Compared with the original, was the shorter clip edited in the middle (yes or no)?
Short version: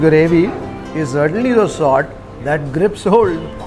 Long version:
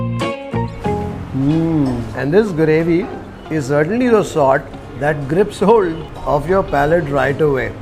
no